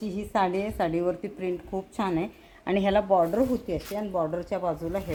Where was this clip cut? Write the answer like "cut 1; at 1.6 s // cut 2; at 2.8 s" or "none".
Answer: none